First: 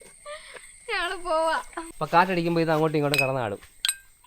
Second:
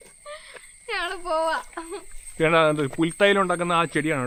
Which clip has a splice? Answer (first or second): first